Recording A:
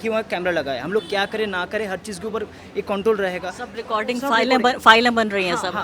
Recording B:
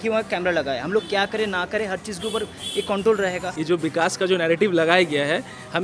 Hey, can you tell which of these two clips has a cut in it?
B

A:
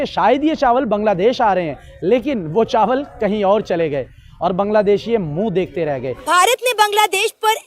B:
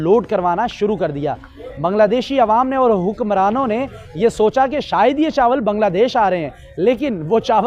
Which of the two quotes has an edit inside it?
A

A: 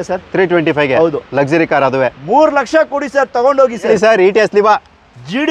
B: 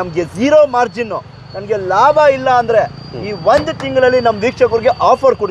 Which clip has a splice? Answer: A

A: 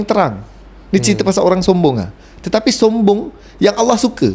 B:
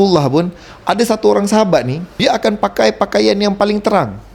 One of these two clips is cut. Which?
B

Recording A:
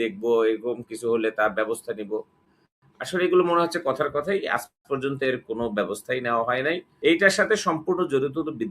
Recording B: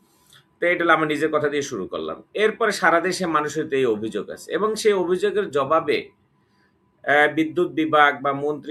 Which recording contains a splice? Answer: A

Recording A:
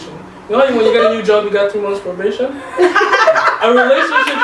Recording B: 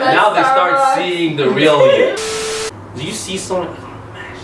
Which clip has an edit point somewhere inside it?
B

